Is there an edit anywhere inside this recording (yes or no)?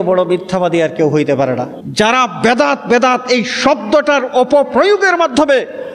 yes